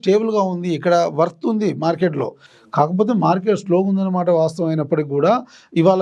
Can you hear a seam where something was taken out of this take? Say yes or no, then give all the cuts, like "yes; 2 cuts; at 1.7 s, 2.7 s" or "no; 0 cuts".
no; 0 cuts